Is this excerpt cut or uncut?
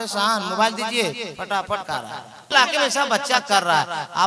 cut